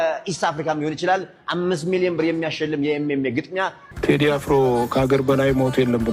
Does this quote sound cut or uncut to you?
cut